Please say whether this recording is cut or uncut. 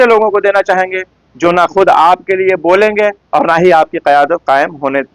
uncut